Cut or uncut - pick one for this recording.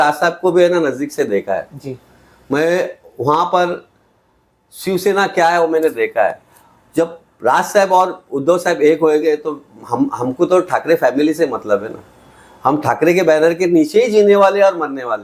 uncut